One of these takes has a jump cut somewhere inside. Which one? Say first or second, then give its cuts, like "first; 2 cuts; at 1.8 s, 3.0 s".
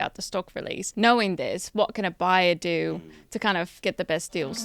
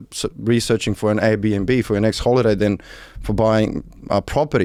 first; 2 cuts; at 0.9 s, 3.7 s